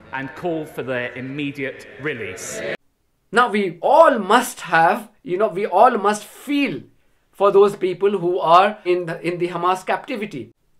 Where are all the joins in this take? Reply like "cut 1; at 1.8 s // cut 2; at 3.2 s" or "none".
none